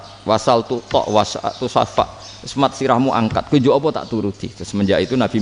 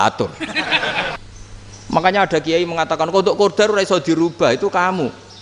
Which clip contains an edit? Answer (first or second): second